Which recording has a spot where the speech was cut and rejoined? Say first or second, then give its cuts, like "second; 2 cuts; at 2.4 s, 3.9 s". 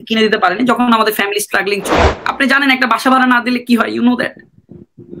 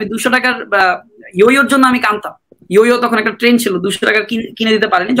first; 1 cut; at 2.0 s